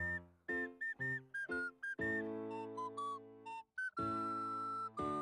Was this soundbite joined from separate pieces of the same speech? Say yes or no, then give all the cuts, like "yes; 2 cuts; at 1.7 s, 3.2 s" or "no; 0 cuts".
no; 0 cuts